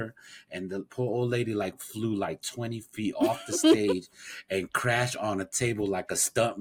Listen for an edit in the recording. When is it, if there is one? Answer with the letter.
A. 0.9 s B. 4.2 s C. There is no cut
C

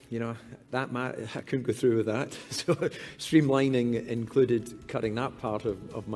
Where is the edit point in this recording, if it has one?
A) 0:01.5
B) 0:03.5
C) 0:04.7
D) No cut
D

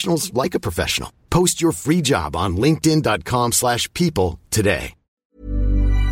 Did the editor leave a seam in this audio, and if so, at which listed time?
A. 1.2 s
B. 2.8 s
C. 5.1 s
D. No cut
C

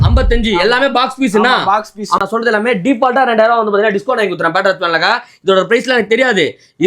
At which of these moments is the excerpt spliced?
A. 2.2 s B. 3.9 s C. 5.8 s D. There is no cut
A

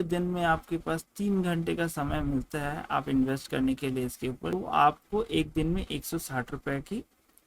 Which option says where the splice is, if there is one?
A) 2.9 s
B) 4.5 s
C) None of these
B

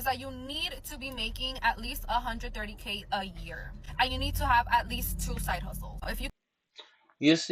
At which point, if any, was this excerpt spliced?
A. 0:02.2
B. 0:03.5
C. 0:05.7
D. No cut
D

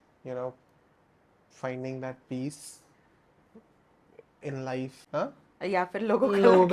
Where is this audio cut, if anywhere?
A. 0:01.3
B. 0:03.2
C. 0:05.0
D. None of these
C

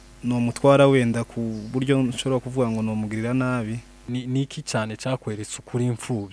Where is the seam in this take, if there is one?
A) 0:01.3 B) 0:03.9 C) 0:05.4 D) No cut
B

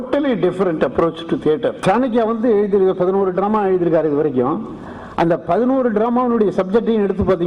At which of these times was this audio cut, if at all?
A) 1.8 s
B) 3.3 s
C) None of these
A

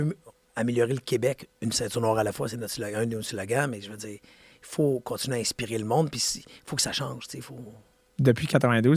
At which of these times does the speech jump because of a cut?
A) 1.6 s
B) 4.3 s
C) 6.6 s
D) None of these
D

